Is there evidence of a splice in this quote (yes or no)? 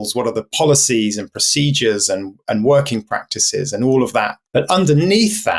yes